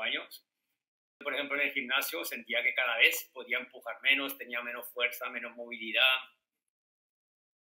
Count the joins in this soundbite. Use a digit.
1